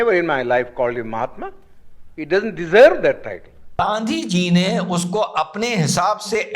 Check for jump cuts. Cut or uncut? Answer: cut